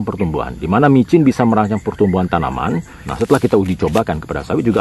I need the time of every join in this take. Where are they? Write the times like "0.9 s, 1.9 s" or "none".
3.0 s